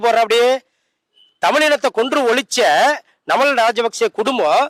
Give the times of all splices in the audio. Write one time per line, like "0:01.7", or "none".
none